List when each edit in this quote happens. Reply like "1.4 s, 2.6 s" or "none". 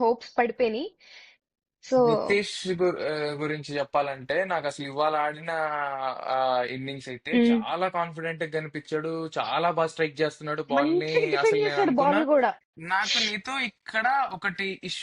12.6 s